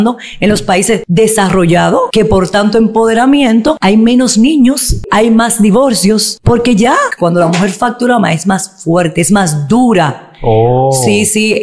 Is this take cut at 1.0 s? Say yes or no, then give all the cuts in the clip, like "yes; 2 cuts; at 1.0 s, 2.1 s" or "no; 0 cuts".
yes; 6 cuts; at 1.0 s, 2.1 s, 3.8 s, 5.1 s, 6.3 s, 7.1 s